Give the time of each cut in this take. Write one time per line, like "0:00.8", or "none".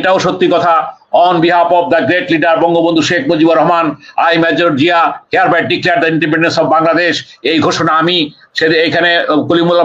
none